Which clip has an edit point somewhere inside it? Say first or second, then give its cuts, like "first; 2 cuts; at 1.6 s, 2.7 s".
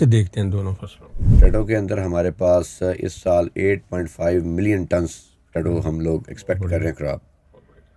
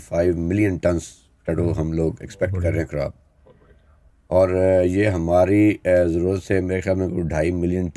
first; 1 cut; at 1.2 s